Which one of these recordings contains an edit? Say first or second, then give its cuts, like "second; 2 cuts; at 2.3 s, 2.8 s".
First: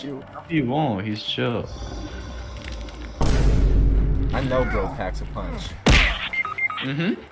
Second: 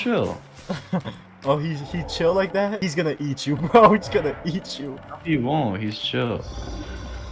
first; 1 cut; at 3.9 s